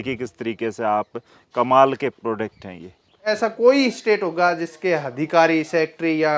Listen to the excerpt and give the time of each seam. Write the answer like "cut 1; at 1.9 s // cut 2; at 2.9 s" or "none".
cut 1; at 3.3 s